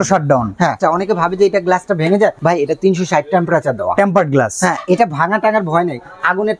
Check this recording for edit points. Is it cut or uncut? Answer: cut